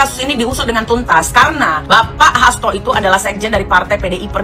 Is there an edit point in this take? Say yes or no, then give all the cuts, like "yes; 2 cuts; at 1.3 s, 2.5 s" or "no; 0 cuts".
yes; 1 cut; at 1.8 s